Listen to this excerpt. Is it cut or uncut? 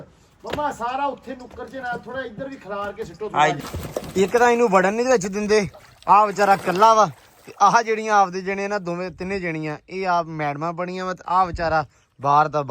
cut